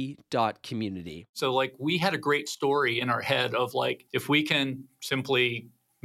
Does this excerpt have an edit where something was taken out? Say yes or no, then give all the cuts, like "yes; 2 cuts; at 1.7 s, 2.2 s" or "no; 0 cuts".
yes; 1 cut; at 1.3 s